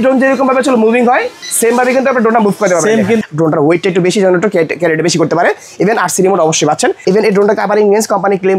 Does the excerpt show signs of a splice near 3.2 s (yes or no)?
yes